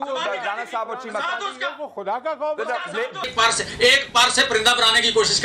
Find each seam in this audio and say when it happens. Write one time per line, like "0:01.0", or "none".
0:03.2